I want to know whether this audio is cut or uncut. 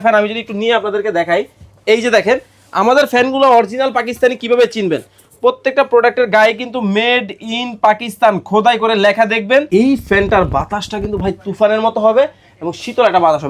cut